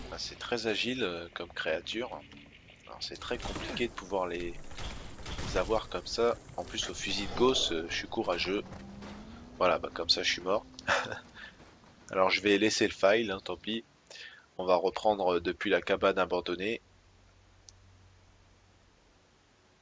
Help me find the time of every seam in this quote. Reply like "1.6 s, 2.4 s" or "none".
4.0 s